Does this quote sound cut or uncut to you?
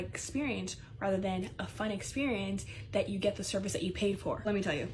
uncut